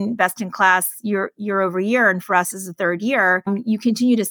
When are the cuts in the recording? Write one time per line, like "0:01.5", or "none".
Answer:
none